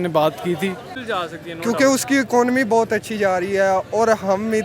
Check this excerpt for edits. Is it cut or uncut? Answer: cut